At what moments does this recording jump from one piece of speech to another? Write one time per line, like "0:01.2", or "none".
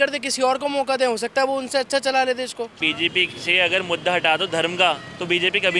0:02.8